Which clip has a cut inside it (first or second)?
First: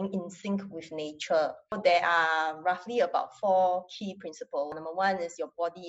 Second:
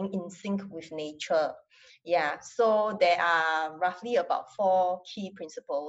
first